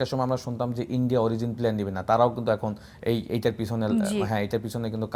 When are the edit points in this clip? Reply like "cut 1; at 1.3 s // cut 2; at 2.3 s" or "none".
none